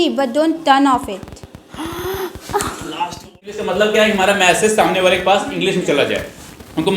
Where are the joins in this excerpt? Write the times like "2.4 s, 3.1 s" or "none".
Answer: 3.4 s